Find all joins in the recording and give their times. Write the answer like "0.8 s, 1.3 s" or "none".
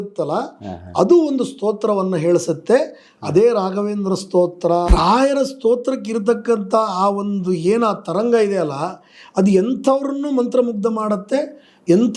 4.9 s

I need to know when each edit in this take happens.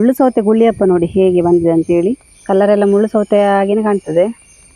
2.3 s

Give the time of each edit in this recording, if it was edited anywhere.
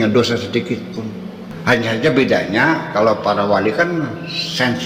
1.5 s

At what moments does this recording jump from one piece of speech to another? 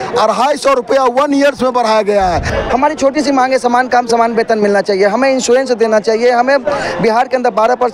2.5 s

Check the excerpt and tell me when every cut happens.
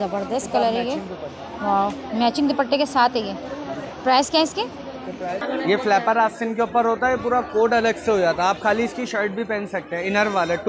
5.4 s

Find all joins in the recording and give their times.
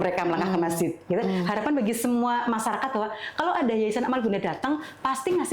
1.1 s

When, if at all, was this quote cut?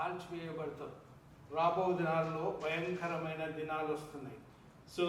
1.0 s

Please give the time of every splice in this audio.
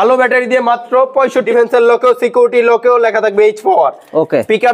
1.5 s

